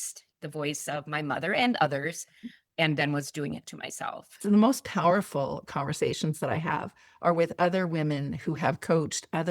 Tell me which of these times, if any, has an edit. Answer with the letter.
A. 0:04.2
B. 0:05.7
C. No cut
A